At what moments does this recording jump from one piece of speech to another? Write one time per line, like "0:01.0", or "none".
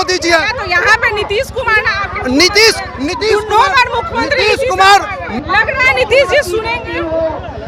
0:05.2